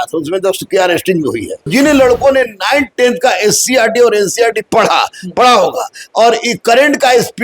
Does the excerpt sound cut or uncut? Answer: cut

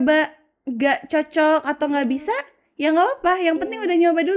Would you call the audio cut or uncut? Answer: uncut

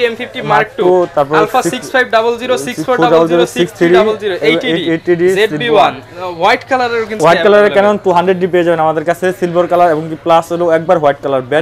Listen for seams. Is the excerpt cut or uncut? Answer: uncut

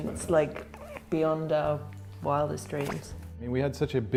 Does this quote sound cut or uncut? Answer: uncut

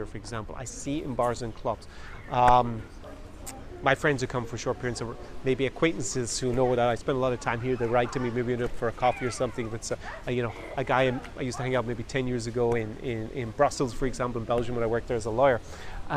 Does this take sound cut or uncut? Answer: uncut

